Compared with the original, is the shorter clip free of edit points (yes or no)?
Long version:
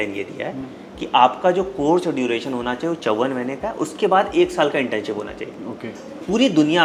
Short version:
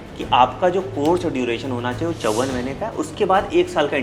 yes